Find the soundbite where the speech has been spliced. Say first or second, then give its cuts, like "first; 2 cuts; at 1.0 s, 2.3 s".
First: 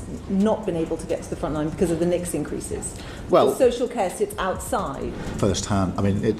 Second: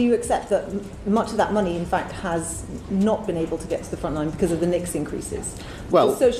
first; 1 cut; at 5.2 s